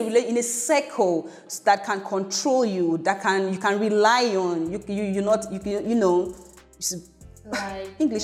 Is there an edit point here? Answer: no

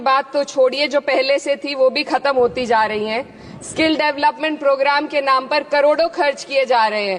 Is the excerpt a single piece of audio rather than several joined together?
yes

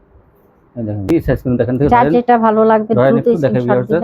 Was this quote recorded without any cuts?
no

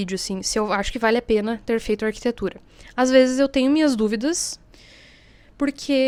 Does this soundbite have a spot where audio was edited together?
no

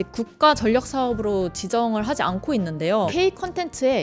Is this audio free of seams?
no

